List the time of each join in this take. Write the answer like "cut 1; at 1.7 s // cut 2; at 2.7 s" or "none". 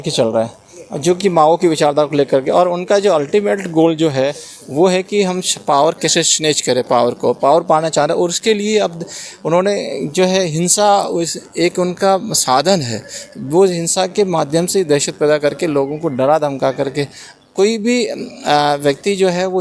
none